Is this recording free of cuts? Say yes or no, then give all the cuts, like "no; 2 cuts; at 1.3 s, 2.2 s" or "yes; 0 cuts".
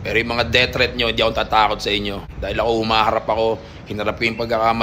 yes; 0 cuts